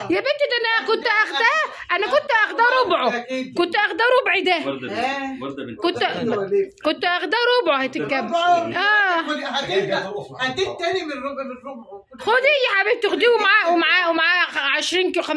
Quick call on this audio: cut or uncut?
uncut